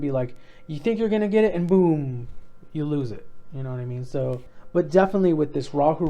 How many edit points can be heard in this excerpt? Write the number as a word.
one